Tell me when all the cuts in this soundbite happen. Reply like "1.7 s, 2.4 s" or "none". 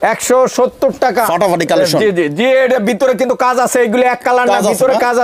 1.3 s